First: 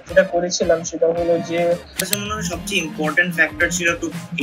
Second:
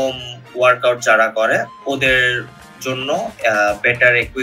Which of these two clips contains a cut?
first; 1 cut; at 2.1 s

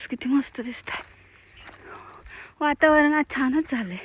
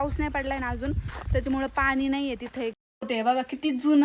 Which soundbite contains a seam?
second; 1 cut; at 2.8 s

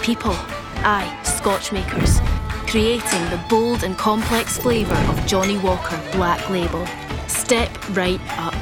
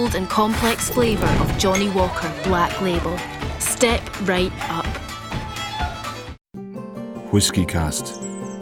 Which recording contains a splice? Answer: second; 1 cut; at 6.5 s

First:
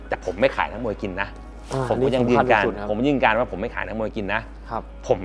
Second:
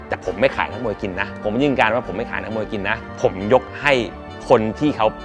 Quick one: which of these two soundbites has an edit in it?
second; 2 cuts; at 1.4 s, 3.1 s

